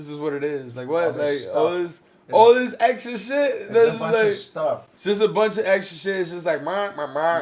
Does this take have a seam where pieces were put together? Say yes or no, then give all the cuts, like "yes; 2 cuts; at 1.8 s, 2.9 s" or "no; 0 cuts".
no; 0 cuts